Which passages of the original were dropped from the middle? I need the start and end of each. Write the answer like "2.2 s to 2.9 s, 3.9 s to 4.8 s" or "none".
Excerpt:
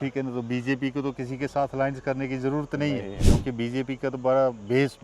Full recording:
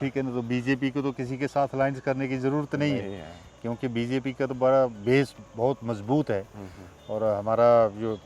3.2 s to 3.5 s